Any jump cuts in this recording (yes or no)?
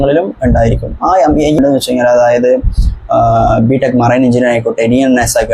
yes